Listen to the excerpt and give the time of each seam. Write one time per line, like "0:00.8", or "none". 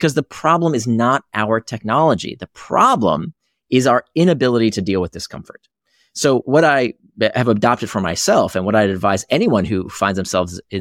0:06.4